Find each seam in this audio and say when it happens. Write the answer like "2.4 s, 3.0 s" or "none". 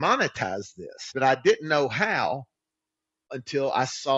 1.1 s, 3.3 s